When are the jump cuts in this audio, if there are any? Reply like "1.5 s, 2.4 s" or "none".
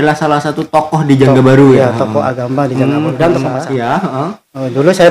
3.7 s